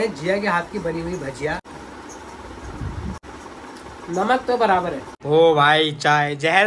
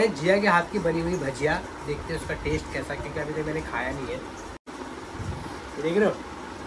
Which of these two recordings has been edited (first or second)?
first